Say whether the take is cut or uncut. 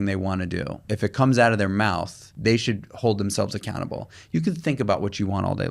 cut